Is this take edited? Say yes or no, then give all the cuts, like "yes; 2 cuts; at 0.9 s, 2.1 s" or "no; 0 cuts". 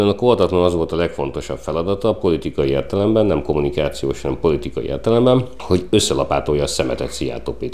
no; 0 cuts